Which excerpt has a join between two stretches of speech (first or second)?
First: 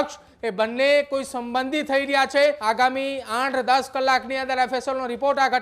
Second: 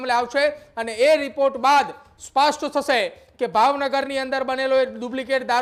first